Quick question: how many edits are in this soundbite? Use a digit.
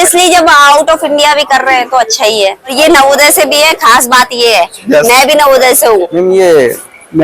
2